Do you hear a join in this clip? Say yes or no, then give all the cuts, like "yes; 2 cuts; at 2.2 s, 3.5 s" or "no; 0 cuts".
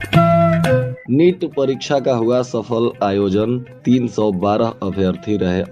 yes; 1 cut; at 0.9 s